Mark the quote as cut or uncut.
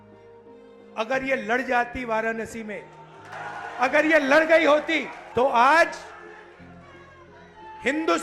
cut